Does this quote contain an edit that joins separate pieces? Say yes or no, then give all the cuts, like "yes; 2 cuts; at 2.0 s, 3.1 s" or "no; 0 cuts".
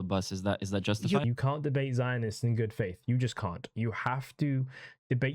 yes; 1 cut; at 1.2 s